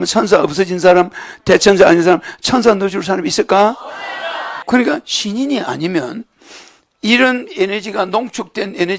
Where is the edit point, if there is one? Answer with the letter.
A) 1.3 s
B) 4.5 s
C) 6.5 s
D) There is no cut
B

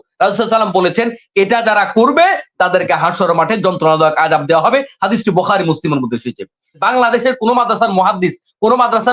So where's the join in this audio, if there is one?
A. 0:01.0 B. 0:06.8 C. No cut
B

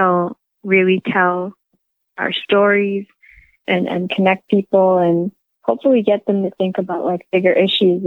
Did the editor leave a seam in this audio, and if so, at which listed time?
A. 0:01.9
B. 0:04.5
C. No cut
C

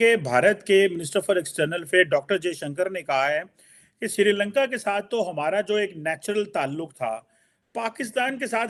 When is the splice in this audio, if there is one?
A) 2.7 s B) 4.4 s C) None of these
C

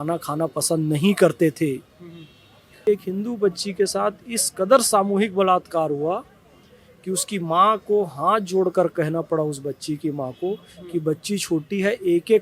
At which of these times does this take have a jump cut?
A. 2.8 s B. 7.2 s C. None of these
A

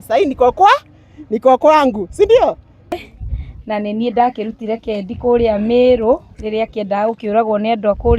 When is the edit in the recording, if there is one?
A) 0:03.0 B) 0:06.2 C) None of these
A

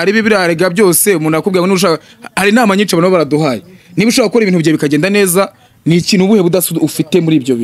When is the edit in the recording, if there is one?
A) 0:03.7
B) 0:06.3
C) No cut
C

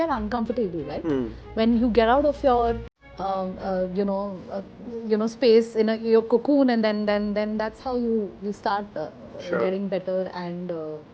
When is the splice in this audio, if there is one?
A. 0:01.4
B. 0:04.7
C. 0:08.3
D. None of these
D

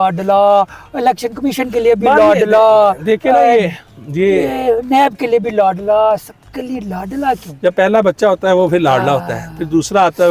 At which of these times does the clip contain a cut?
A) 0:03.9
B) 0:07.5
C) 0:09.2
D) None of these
B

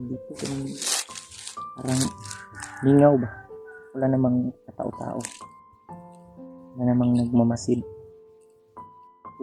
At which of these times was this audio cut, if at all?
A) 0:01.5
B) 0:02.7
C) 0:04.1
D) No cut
D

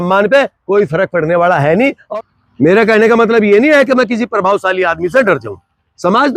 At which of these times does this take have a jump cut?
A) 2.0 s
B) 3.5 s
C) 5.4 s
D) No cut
A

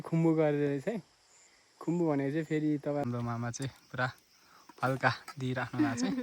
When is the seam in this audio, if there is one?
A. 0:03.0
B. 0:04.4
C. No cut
A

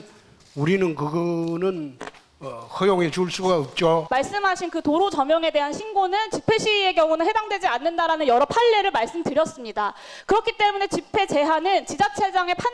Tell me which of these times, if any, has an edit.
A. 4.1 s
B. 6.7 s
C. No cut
A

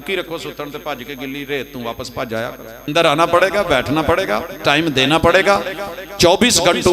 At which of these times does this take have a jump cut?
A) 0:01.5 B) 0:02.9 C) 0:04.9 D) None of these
B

